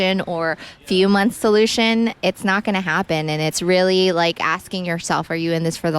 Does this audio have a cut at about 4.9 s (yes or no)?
no